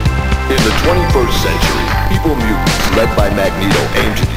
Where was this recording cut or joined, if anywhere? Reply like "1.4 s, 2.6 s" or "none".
none

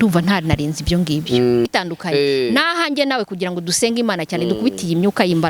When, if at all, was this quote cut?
1.7 s

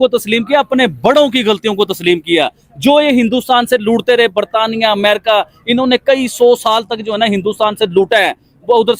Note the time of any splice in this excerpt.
none

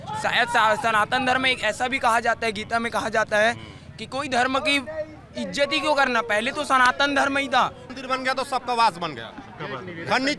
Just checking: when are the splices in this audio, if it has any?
7.9 s

